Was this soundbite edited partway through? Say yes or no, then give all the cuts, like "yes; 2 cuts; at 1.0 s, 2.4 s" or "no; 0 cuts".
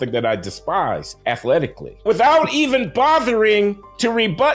yes; 2 cuts; at 1.1 s, 2.0 s